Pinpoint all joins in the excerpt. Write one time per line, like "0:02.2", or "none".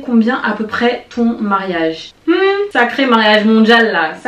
0:02.1